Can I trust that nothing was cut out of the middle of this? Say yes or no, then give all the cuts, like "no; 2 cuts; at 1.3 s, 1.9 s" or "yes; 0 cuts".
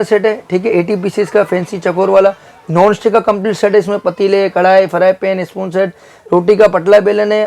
yes; 0 cuts